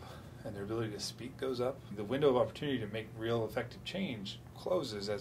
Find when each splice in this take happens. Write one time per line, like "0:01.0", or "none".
0:01.9